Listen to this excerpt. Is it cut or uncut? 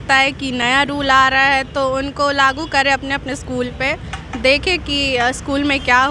uncut